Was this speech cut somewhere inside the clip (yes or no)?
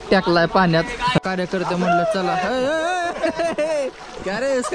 yes